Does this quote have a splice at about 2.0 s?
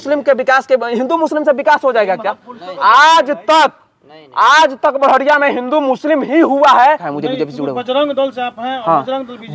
no; 1 cut; at 7.1 s

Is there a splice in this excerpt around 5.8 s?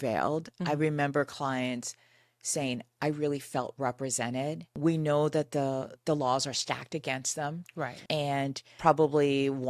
no; 1 cut; at 8.7 s

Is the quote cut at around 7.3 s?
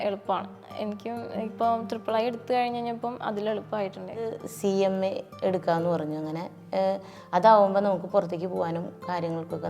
no; 1 cut; at 4.4 s

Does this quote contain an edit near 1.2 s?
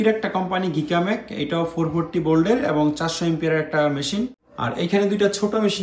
no; 1 cut; at 4.5 s

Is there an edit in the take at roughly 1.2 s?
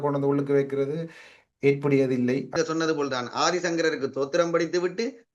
no; 1 cut; at 2.5 s

